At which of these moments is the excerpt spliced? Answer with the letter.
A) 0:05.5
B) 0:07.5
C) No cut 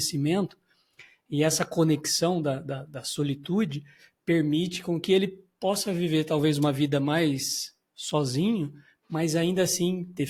C